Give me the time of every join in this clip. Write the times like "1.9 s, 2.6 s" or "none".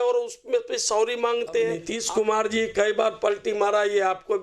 1.9 s